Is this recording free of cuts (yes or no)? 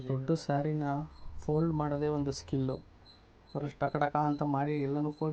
yes